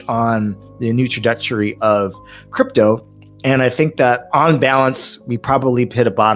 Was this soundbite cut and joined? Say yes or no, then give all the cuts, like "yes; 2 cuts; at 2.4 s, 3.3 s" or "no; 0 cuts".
no; 0 cuts